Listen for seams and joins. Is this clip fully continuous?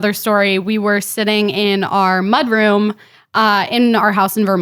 yes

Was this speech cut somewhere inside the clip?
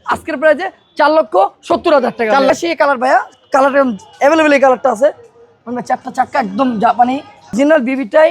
yes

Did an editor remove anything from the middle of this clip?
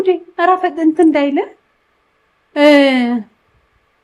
no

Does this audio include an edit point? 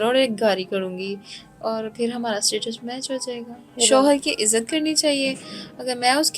yes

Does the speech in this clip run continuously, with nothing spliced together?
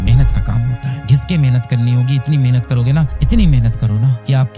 no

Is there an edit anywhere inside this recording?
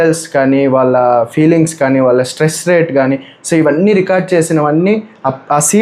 no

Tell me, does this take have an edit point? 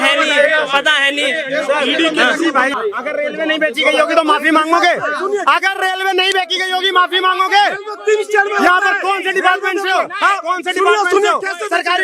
yes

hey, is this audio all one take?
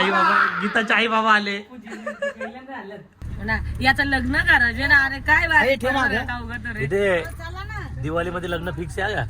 no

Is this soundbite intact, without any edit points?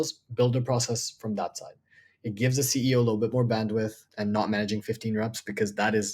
no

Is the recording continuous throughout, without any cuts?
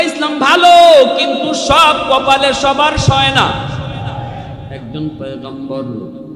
no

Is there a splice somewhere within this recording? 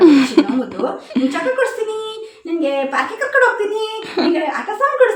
no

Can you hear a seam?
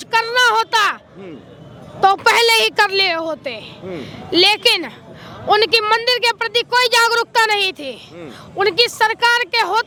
no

